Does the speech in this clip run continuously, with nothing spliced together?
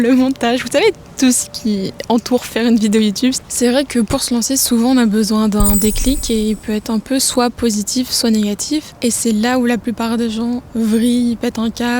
no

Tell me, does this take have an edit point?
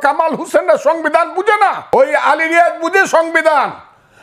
yes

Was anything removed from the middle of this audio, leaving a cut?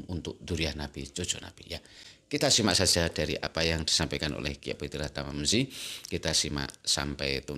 no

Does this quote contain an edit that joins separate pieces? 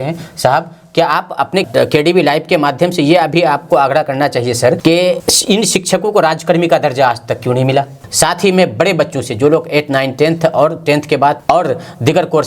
yes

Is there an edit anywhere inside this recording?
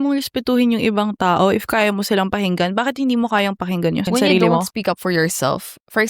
yes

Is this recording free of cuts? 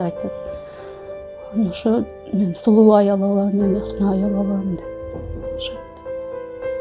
yes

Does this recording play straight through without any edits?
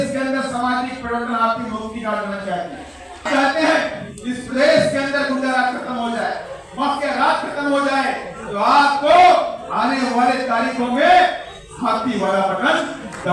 no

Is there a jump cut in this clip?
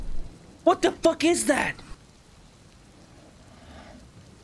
yes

